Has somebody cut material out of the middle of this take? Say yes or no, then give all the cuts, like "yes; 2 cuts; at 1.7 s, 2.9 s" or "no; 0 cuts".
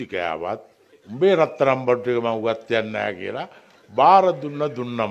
no; 0 cuts